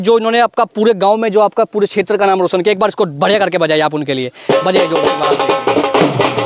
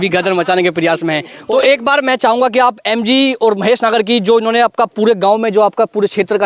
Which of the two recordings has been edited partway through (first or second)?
second